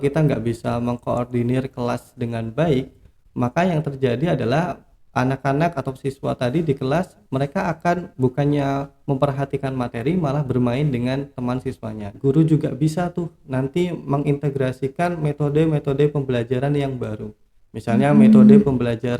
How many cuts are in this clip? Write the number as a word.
one